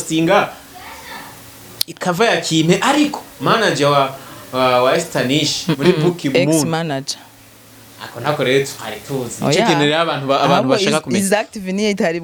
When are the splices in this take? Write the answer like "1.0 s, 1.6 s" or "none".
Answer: none